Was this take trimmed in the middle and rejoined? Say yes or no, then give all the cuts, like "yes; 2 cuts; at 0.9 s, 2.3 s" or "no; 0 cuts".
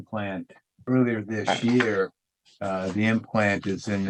no; 0 cuts